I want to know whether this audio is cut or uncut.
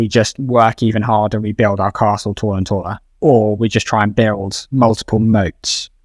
uncut